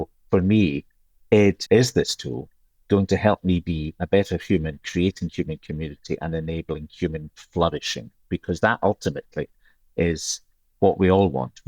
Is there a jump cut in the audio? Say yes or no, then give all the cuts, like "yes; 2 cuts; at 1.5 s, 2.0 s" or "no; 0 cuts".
yes; 1 cut; at 1.6 s